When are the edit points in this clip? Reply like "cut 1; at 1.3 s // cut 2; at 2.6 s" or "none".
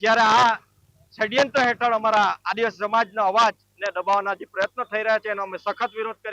none